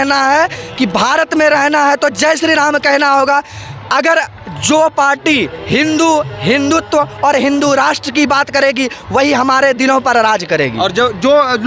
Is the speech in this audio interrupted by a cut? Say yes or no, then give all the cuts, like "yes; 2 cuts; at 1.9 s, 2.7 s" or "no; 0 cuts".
no; 0 cuts